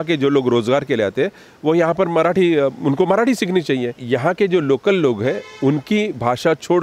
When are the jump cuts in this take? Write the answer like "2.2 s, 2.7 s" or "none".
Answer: 4.0 s